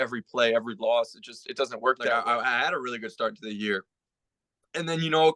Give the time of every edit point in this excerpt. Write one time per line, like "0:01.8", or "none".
0:02.2